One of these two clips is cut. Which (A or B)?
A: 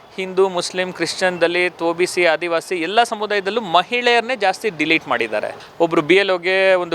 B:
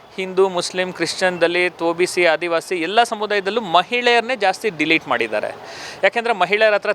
A